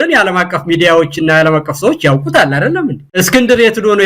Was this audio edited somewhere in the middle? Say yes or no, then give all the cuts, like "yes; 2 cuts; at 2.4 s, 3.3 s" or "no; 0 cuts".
yes; 1 cut; at 3.0 s